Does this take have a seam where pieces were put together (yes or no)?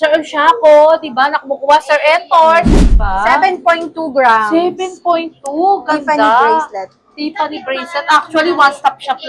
yes